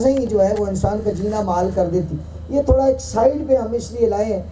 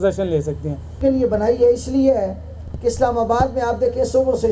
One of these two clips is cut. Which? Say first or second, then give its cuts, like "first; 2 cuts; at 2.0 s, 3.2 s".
second; 1 cut; at 1.0 s